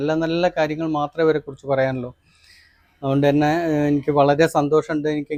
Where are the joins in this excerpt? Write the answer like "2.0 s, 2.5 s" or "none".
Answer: none